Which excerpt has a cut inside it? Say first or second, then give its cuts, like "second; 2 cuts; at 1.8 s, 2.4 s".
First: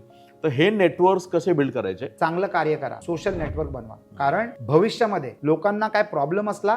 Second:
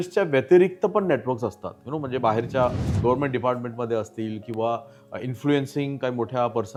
first; 4 cuts; at 2.0 s, 3.0 s, 4.6 s, 5.3 s